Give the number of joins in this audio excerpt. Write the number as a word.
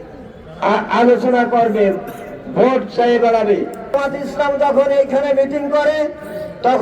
one